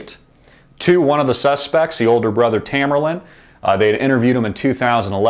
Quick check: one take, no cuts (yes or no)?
yes